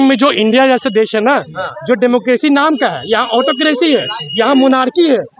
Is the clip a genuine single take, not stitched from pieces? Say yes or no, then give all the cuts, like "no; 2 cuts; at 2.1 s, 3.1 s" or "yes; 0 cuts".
yes; 0 cuts